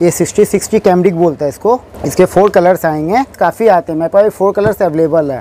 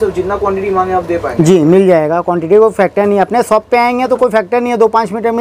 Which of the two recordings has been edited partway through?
first; 2 cuts; at 2.0 s, 3.3 s

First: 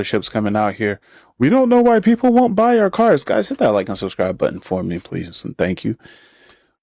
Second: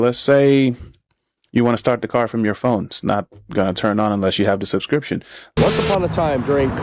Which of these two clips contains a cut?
second; 1 cut; at 5.5 s

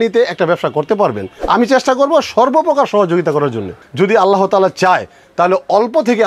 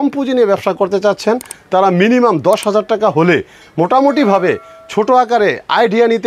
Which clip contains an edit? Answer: first; 2 cuts; at 1.3 s, 3.8 s

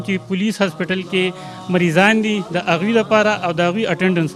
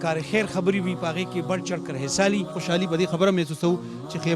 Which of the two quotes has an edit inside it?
second; 1 cut; at 2.6 s

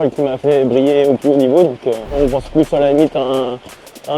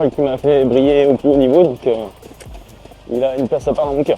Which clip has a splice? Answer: first; 1 cut; at 2.2 s

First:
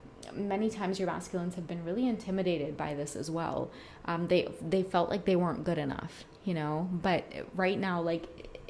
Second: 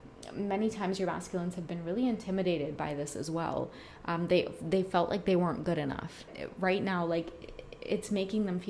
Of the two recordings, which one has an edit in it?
second; 1 cut; at 6.3 s

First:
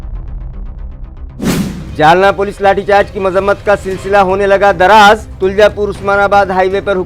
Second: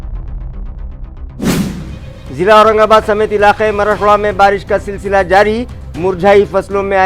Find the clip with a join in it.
second; 1 cut; at 1.8 s

